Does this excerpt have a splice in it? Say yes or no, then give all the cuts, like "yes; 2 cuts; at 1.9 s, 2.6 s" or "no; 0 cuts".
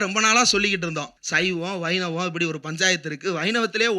yes; 1 cut; at 1.2 s